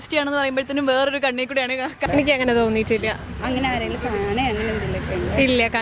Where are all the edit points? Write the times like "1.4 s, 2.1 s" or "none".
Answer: 2.0 s